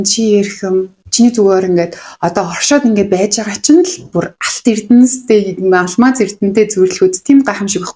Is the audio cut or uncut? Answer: uncut